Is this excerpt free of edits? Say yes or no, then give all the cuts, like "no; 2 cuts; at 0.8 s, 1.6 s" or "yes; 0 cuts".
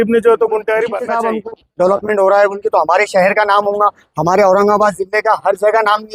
no; 1 cut; at 1.0 s